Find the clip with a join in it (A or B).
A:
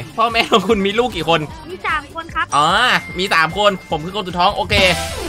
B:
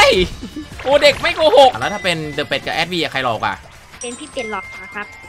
B